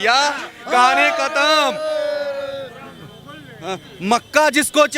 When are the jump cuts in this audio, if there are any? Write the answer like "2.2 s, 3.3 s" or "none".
none